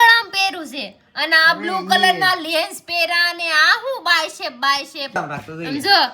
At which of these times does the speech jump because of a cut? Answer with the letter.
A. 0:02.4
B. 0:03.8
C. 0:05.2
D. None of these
C